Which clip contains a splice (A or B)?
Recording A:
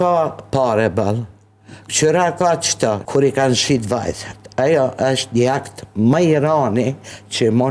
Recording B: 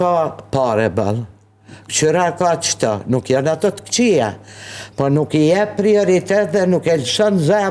A